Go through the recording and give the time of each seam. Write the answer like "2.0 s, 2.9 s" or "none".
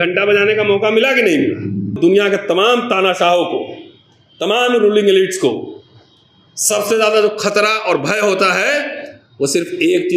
2.0 s